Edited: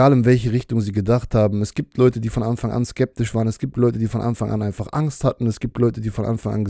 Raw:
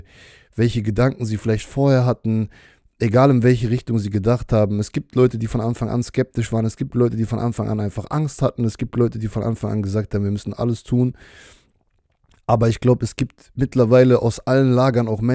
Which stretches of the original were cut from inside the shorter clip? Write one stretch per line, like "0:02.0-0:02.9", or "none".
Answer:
none